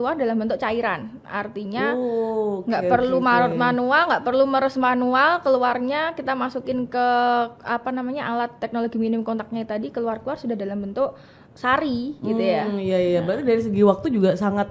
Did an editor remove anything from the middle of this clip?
no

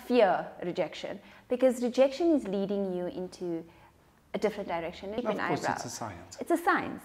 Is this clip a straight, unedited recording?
no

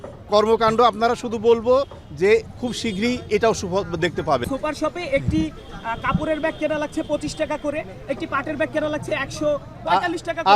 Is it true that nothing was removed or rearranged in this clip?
no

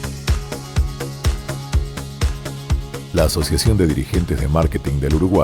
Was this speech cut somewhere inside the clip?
yes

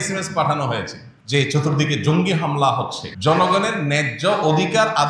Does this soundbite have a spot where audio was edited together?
yes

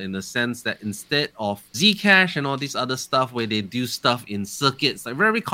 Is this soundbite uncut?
no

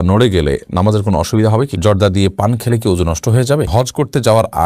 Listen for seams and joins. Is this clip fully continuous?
no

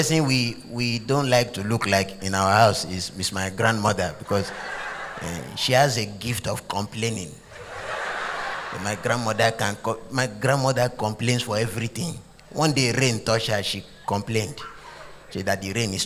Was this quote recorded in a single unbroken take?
yes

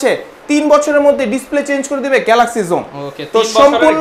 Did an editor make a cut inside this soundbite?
no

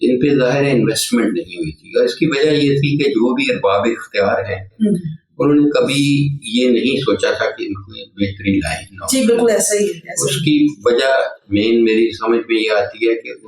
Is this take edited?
no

